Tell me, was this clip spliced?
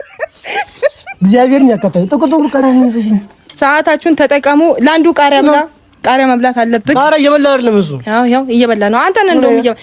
yes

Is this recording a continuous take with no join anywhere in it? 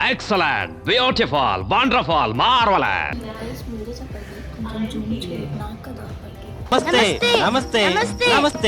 no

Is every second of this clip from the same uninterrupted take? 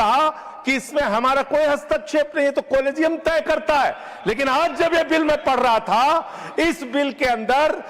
yes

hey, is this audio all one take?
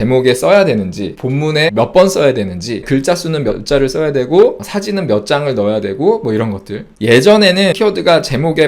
no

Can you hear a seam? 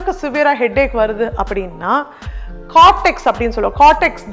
no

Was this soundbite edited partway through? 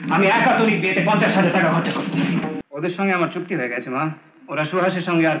yes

